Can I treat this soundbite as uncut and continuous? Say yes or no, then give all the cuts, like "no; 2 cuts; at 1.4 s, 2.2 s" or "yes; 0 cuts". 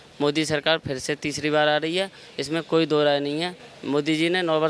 yes; 0 cuts